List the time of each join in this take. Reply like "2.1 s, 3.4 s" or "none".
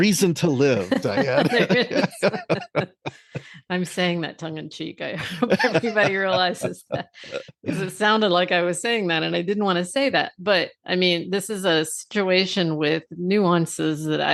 none